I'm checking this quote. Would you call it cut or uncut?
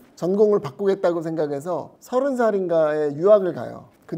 cut